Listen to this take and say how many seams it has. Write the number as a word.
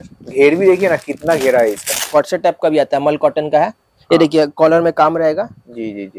one